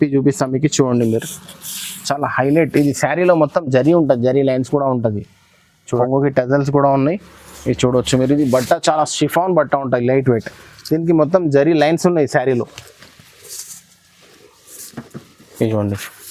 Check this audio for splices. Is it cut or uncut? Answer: uncut